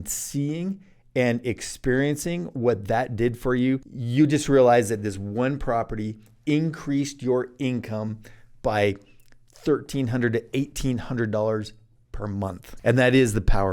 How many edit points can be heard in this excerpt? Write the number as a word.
two